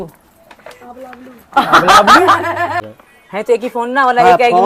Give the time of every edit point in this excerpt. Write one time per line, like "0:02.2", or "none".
0:02.9